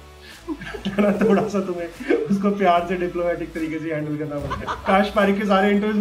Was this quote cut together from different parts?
yes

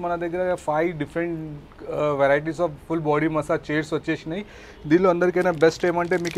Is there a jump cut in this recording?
no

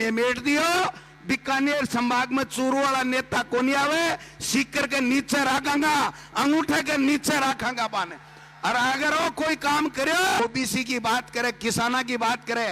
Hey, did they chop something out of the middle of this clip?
yes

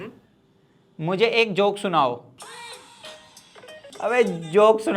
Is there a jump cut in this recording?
yes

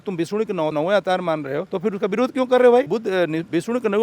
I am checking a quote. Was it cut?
yes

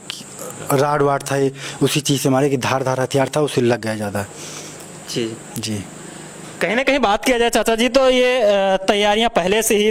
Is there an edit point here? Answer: no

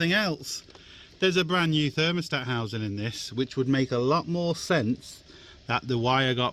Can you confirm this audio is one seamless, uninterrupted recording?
yes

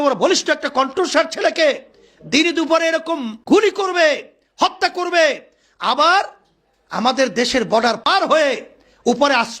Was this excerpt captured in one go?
no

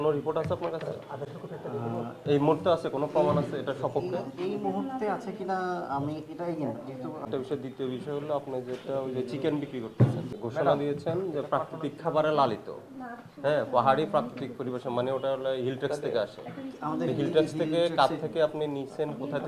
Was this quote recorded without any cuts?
no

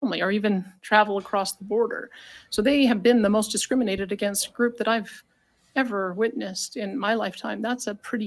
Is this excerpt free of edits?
yes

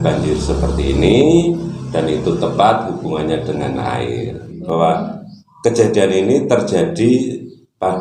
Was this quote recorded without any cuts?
no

